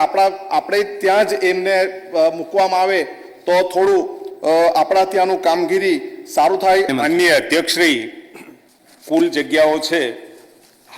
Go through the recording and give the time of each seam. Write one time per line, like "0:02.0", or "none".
none